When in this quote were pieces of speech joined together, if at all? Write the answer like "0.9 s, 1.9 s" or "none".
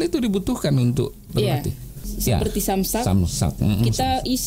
2.0 s